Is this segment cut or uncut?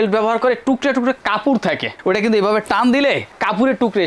uncut